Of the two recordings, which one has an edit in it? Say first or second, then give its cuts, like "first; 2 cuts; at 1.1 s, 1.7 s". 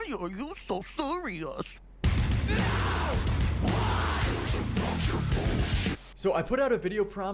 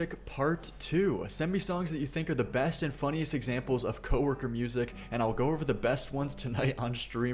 first; 2 cuts; at 1.7 s, 6.4 s